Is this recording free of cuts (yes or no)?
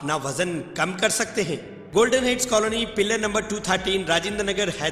no